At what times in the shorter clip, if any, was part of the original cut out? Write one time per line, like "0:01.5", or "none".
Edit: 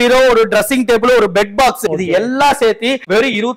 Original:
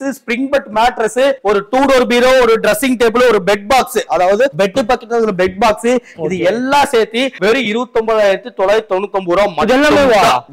0:01.8